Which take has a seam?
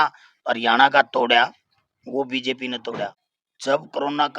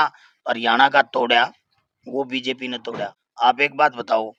first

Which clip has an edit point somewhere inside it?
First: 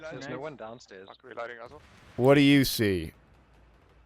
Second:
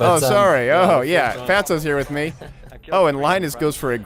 first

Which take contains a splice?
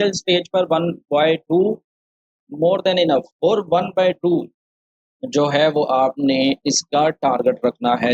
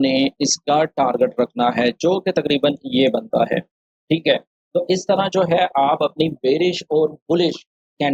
first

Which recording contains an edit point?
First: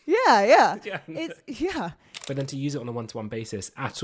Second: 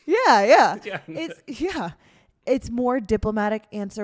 first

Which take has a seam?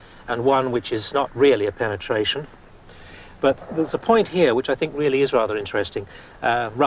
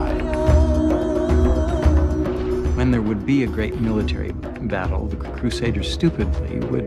first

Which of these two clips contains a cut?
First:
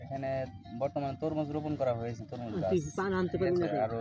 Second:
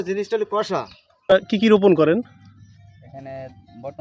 second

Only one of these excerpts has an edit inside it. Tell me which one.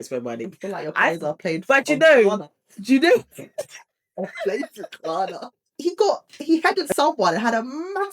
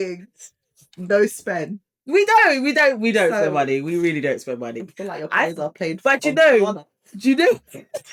first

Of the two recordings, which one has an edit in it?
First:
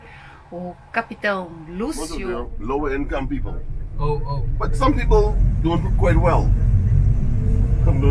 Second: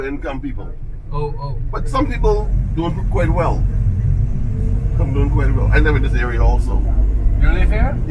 first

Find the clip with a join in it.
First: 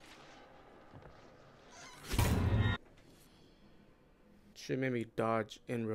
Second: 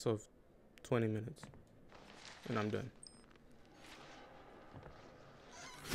first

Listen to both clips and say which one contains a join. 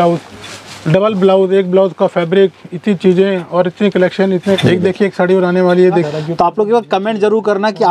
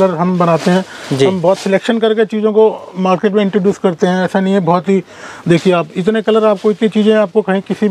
first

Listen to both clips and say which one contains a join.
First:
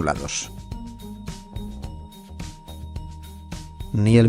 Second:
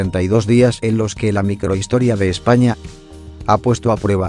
first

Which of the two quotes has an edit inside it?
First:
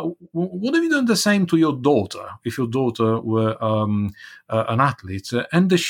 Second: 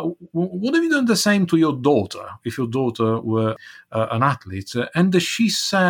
second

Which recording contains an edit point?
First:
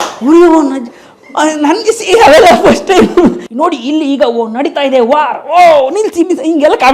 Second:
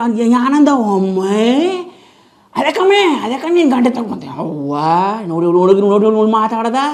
first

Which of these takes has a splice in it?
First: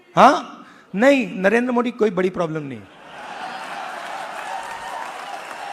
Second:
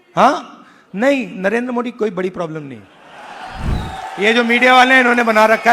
second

